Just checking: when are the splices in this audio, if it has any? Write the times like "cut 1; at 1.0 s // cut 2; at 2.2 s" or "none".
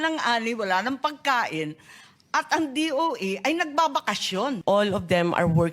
cut 1; at 4.6 s